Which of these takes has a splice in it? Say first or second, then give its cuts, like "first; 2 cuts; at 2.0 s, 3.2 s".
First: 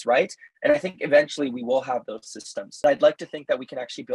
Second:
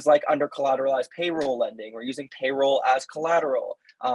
first; 1 cut; at 2.8 s